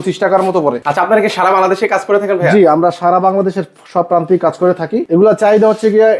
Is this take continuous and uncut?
no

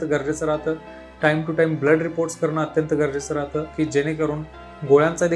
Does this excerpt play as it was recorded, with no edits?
no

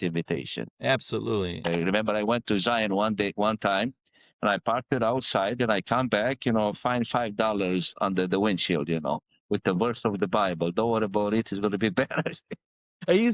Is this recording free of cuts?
no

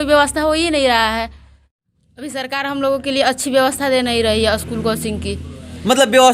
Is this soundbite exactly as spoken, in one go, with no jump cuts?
no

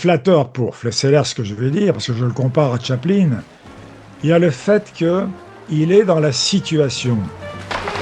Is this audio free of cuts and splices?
yes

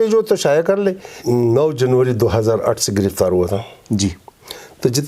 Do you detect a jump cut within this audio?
yes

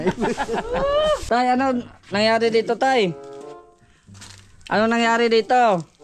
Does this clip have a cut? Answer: yes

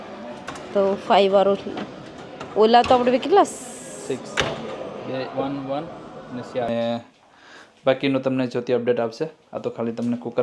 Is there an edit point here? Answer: yes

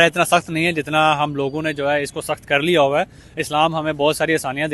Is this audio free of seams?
yes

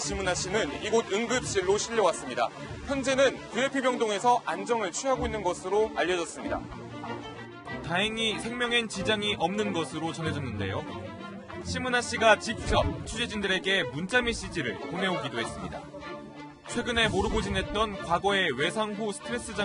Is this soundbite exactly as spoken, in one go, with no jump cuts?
yes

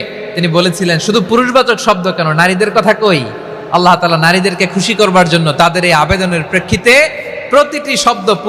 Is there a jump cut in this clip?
no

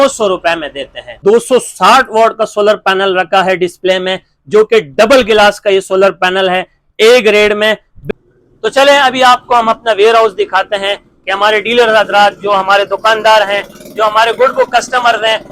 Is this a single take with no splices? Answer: no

